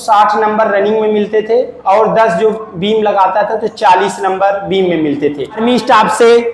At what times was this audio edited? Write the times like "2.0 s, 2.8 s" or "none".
5.6 s

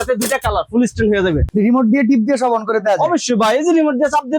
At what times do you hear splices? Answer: 1.4 s

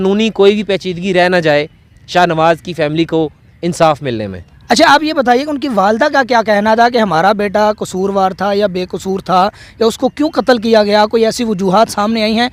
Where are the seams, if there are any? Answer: none

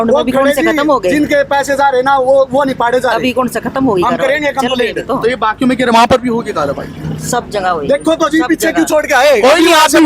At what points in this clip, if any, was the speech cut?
none

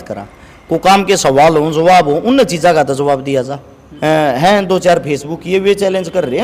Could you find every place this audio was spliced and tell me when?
3.8 s

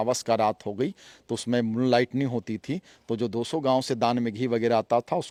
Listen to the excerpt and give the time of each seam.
none

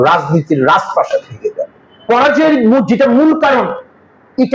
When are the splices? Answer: 2.0 s

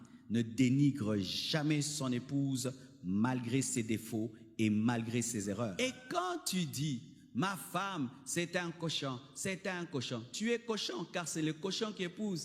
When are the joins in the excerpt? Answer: 5.7 s

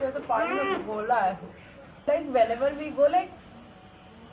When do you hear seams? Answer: none

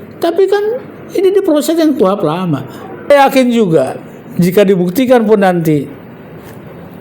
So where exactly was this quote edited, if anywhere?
3.1 s

